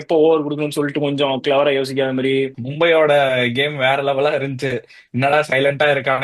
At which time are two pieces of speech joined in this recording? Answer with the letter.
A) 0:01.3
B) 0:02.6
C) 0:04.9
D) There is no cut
B